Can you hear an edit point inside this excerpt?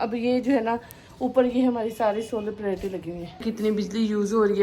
yes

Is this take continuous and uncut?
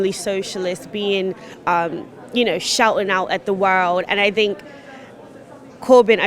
yes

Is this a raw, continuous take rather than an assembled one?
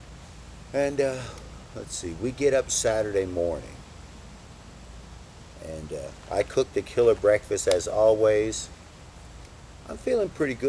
yes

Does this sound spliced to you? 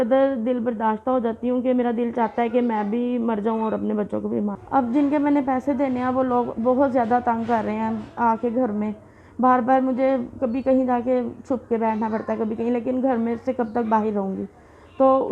yes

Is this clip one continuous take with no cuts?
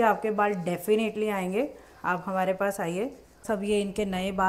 no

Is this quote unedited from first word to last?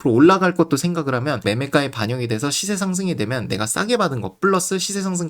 no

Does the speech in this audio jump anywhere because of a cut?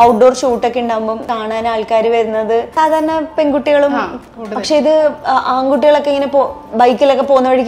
yes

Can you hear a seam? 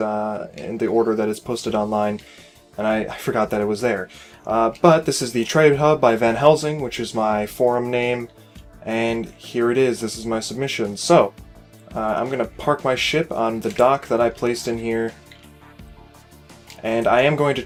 no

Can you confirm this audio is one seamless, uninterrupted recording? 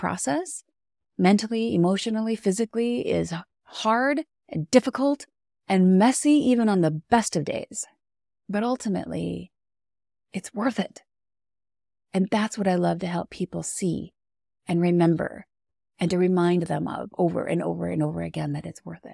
yes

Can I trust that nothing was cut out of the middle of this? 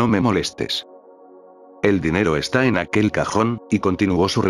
yes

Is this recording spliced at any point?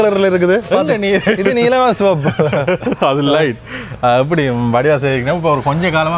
no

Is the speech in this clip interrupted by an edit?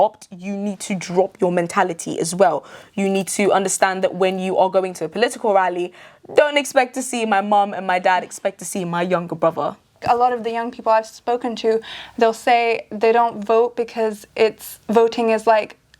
yes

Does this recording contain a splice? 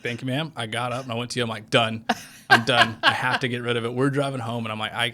no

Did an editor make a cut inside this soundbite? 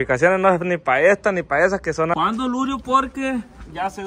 yes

